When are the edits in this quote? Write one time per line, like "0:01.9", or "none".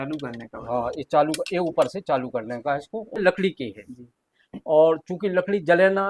0:03.2